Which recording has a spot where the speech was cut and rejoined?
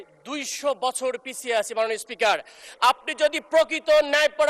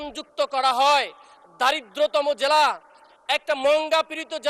first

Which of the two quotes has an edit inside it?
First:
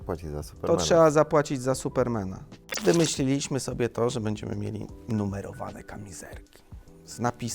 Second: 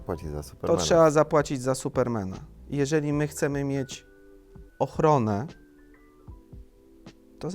first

